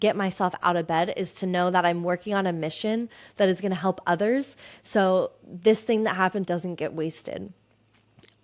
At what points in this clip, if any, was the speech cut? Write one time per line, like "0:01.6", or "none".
0:06.5